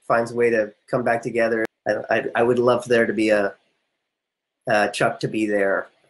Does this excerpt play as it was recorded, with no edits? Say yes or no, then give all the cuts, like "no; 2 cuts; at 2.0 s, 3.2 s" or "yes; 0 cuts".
no; 1 cut; at 1.7 s